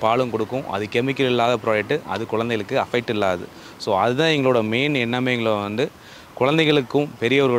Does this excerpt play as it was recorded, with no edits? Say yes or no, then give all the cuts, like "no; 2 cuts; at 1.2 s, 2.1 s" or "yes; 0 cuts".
yes; 0 cuts